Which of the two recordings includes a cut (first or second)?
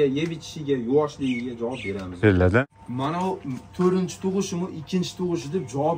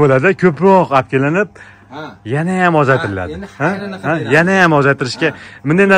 first